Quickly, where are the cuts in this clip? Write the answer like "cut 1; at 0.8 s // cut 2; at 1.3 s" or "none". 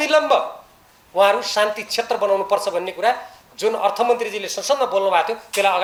none